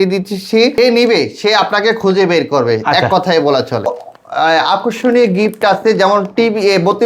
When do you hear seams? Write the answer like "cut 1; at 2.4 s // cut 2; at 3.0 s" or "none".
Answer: cut 1; at 0.8 s // cut 2; at 4.0 s